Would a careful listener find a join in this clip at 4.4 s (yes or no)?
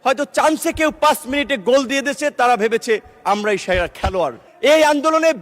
yes